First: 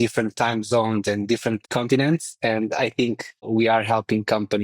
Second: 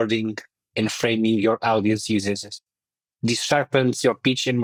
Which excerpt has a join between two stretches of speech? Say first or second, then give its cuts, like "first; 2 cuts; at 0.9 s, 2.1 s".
first; 2 cuts; at 1.6 s, 3.4 s